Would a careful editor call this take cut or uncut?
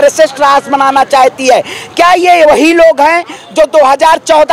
uncut